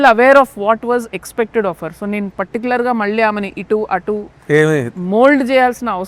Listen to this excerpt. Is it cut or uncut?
uncut